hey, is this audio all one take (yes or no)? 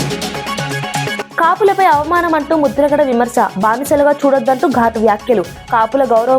yes